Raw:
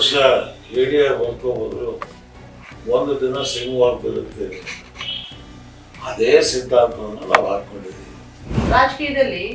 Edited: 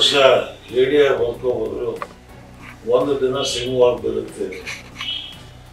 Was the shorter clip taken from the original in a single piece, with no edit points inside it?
yes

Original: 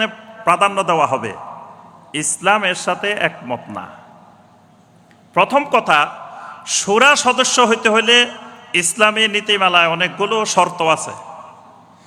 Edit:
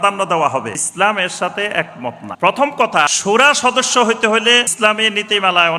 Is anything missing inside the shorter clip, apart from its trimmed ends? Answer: yes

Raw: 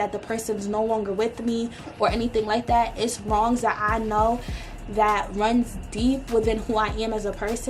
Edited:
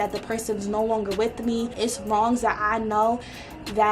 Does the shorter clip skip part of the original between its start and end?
yes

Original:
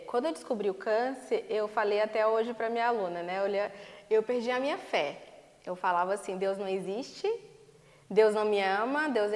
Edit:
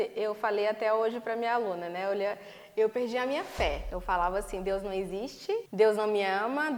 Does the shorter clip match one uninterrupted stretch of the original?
no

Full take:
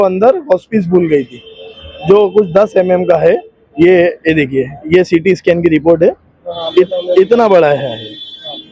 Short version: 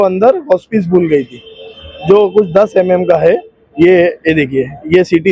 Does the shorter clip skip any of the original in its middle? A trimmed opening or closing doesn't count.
no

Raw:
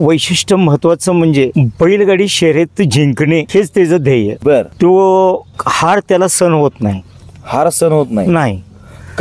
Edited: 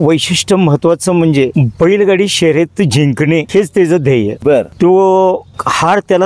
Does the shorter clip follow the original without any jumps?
yes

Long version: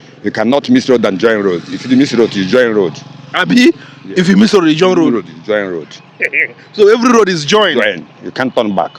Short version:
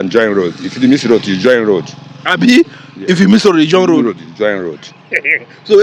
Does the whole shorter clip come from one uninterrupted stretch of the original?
yes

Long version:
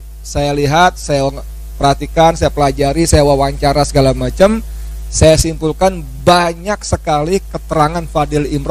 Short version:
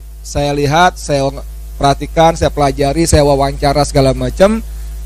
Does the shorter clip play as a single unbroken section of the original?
yes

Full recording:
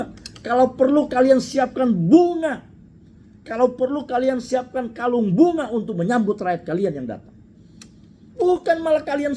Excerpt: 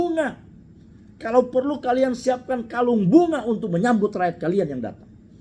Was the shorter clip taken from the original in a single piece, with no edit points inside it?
yes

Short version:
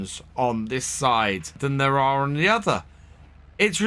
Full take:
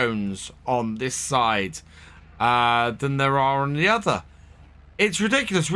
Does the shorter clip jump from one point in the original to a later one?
yes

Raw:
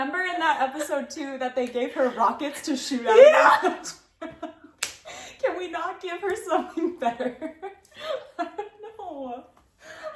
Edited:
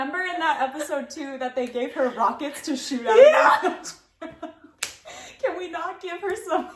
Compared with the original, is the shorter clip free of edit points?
yes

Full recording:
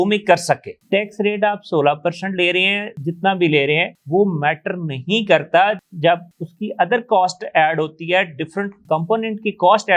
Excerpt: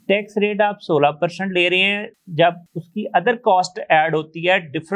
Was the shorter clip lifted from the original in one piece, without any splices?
no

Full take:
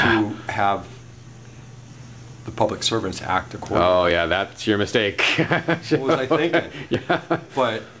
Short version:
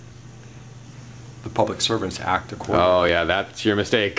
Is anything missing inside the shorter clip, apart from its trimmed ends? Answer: no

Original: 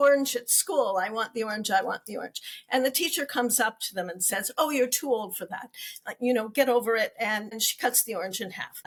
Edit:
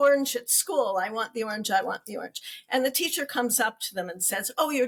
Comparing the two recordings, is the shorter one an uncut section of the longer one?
yes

